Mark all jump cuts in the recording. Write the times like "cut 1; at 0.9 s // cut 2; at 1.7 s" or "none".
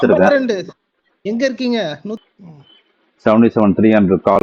cut 1; at 2.2 s